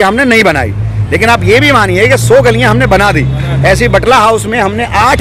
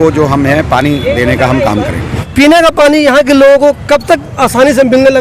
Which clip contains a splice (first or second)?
second